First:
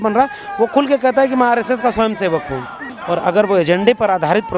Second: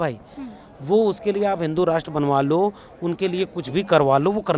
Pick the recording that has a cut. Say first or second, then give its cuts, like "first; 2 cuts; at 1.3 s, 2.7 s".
first; 1 cut; at 2.9 s